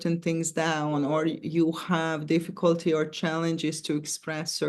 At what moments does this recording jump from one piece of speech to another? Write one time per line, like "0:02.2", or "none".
none